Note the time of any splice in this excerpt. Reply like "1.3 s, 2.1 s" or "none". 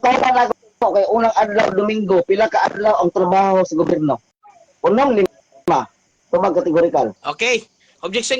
7.2 s